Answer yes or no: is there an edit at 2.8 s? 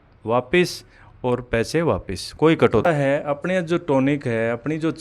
yes